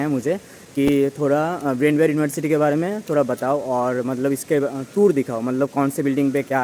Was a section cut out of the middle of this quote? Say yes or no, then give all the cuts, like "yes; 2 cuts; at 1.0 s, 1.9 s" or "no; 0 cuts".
no; 0 cuts